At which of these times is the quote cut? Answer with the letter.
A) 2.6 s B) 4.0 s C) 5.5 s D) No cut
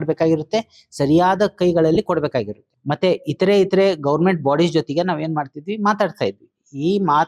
A